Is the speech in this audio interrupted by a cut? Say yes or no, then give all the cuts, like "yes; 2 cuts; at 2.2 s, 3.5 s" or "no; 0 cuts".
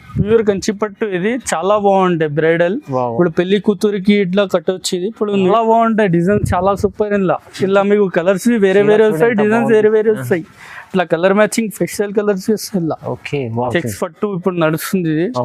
yes; 2 cuts; at 5.5 s, 13.7 s